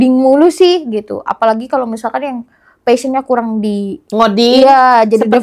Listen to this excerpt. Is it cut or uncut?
uncut